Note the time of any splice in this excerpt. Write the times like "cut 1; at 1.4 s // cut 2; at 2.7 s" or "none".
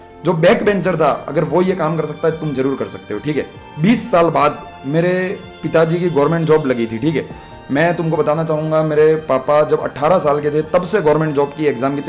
cut 1; at 3.6 s